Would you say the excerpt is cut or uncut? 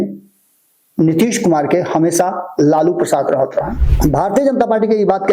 cut